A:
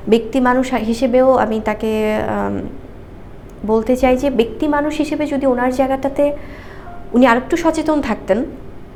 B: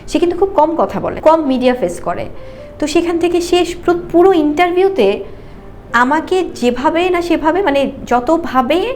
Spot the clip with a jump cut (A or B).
B